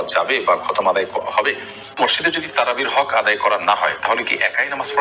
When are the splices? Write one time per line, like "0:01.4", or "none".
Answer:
0:02.0

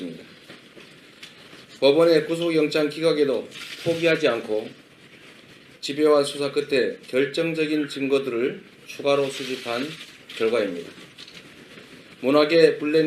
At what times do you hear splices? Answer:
0:07.0

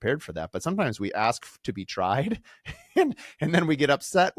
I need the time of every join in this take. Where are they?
none

